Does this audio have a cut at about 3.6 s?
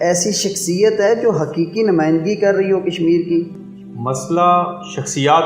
yes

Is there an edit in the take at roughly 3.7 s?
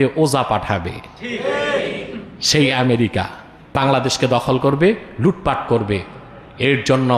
yes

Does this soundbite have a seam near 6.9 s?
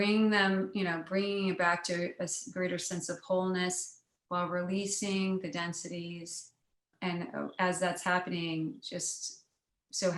yes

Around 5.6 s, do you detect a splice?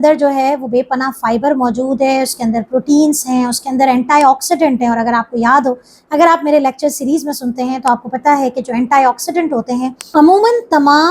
no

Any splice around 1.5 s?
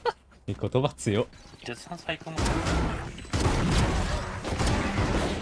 yes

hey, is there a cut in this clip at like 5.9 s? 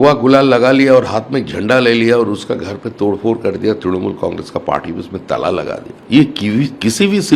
yes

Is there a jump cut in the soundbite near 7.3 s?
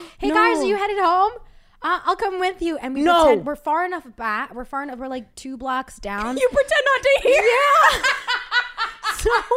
no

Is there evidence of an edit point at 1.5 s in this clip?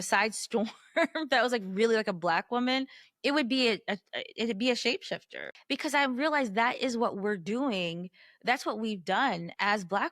no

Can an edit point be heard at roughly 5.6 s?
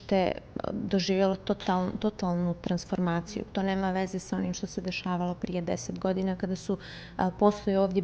no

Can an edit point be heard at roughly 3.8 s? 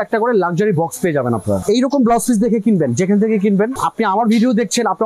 yes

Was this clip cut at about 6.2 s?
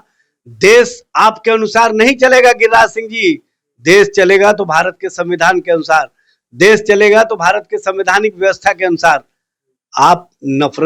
no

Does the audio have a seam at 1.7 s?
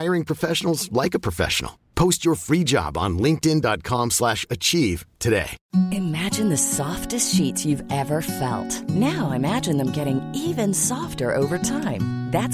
no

